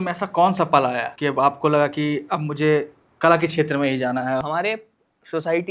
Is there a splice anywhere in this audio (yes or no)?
yes